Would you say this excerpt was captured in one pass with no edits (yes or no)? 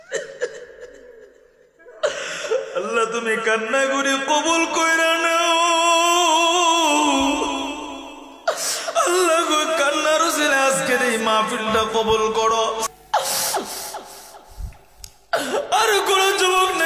no